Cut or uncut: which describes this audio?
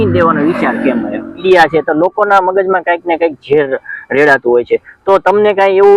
cut